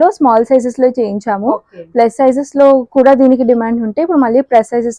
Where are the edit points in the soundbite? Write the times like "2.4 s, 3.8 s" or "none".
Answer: none